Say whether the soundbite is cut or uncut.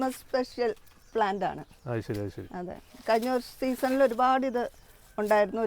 uncut